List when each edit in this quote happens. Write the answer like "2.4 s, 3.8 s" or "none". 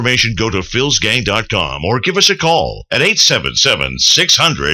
none